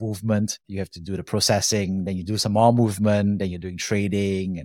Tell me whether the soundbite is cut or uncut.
uncut